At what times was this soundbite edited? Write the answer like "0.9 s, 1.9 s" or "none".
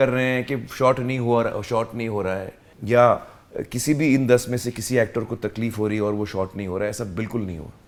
none